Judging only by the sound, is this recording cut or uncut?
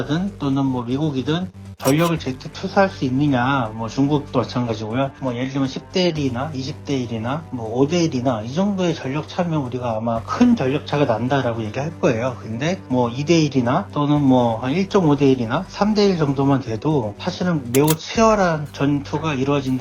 cut